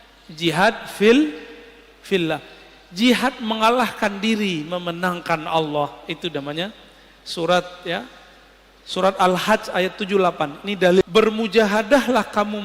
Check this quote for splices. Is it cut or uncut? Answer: cut